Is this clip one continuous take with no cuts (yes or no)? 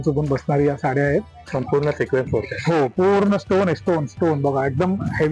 no